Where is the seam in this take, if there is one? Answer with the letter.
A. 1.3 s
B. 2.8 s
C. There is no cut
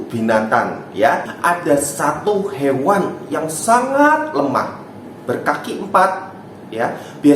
A